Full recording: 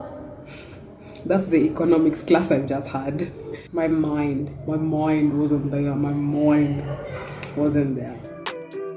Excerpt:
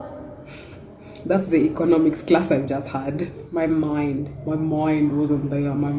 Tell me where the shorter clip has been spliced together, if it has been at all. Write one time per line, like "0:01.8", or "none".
0:03.4

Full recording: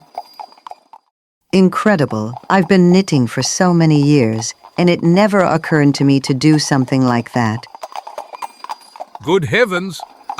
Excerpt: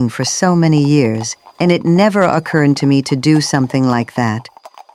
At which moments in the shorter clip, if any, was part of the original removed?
none

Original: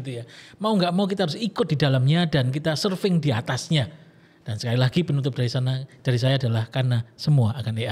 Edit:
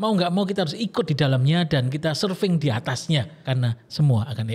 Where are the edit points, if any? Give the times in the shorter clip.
0:03.4

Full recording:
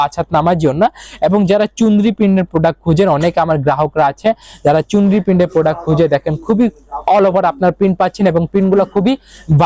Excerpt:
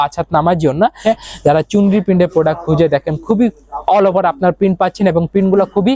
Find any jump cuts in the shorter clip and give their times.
0:01.0

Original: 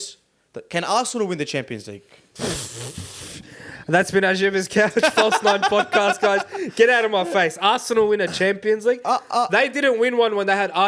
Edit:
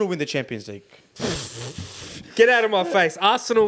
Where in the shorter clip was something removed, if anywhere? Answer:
0:02.2

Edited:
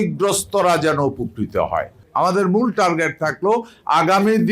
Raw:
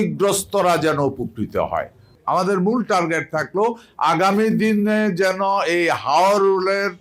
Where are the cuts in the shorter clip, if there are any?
0:02.0

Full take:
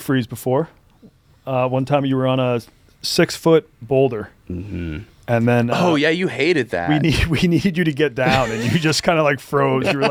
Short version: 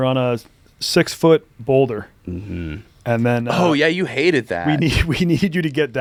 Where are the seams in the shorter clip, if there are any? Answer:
none

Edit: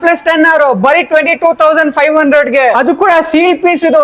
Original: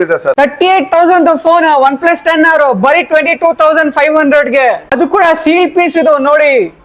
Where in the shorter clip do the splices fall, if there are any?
0:02.8

